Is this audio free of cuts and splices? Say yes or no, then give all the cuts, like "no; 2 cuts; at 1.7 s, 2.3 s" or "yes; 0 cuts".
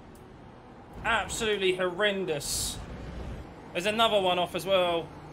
no; 1 cut; at 3.5 s